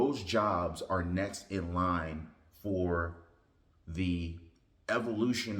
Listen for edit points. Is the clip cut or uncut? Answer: uncut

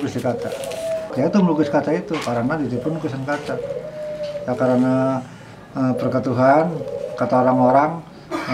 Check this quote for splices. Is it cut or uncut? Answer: cut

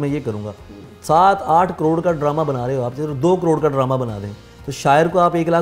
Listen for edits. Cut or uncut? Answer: uncut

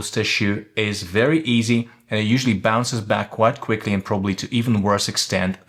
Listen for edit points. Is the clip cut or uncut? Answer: uncut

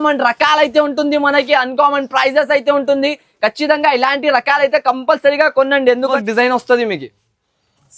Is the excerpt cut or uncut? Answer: cut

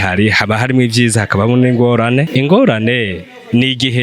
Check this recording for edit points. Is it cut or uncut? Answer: cut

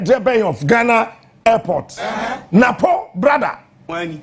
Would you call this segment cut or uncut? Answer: uncut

